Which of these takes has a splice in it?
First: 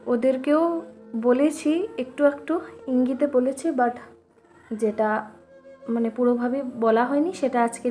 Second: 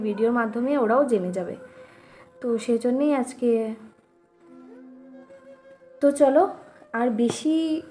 second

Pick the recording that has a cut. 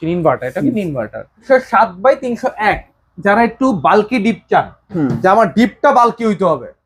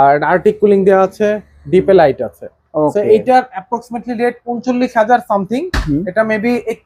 first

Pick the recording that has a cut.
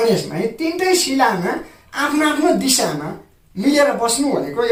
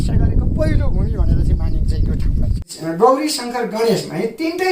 second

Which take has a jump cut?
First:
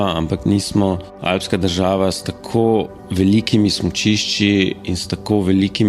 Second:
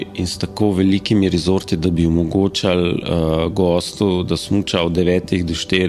first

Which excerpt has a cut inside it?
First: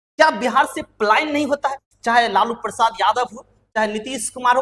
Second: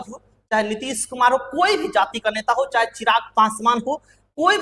first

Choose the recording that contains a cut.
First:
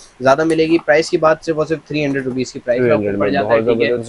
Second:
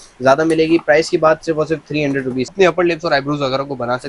second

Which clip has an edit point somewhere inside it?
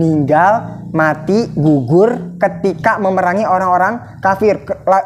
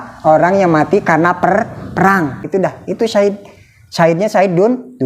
second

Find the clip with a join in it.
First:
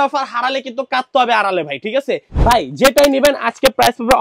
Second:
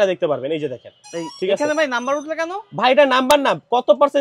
first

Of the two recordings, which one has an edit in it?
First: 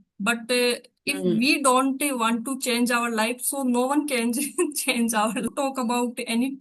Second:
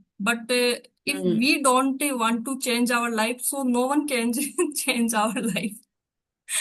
first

